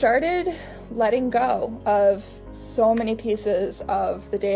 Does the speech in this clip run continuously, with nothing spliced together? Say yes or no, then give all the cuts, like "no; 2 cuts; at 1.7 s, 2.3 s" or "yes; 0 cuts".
yes; 0 cuts